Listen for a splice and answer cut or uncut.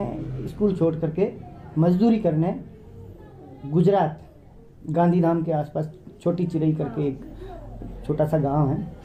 uncut